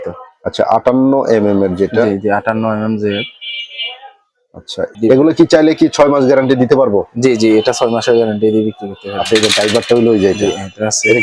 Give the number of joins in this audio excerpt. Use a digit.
1